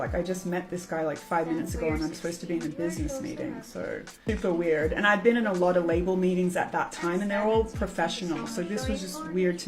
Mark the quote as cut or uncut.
cut